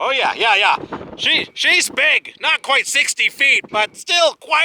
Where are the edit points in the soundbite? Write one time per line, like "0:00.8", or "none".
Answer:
none